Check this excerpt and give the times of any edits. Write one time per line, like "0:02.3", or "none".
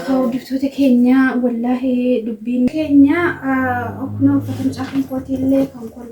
0:02.7